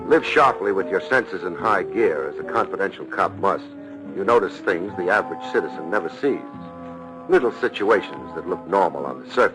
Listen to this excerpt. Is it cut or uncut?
uncut